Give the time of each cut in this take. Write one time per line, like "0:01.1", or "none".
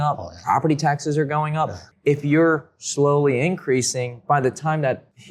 0:01.8